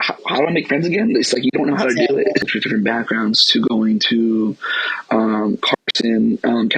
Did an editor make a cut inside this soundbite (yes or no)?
yes